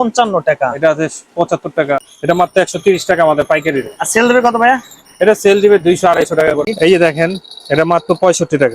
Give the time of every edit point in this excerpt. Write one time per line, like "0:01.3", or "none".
0:02.1
0:06.6

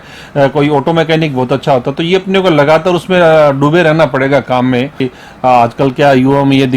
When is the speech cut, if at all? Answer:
0:05.1

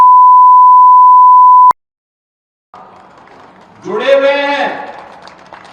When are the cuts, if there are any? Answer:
0:01.7

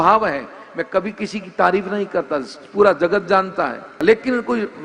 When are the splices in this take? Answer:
0:03.9

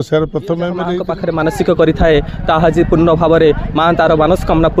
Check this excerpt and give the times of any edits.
0:01.1

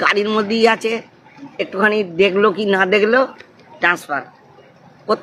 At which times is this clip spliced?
none

